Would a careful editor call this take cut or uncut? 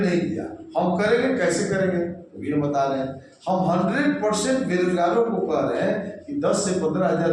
uncut